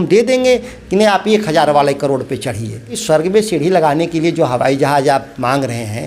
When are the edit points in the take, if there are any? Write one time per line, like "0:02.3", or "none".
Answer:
0:03.0

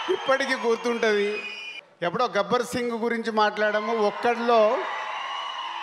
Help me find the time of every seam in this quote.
0:01.7

